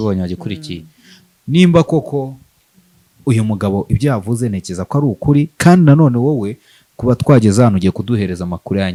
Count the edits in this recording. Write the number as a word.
zero